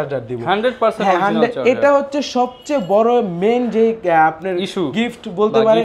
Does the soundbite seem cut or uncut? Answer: uncut